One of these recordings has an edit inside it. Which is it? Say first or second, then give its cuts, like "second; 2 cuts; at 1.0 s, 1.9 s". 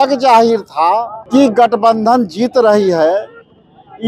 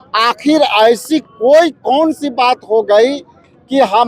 first; 1 cut; at 1.2 s